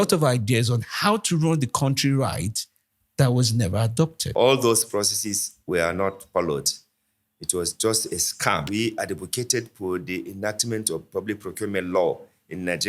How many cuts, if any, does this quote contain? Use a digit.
2